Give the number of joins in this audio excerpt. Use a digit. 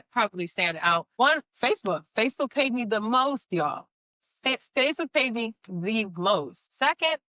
0